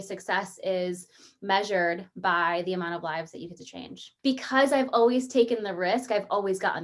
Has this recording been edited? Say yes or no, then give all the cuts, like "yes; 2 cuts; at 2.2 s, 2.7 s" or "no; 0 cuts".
yes; 1 cut; at 4.0 s